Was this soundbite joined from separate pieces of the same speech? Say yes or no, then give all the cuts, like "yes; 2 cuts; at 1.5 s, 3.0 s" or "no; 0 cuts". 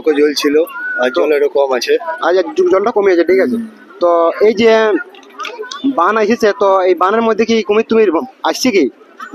no; 0 cuts